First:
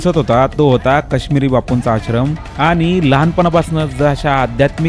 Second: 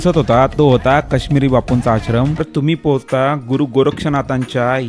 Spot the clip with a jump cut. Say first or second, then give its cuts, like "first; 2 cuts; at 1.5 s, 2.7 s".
second; 1 cut; at 2.5 s